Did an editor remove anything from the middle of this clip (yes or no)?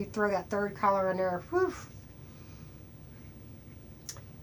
no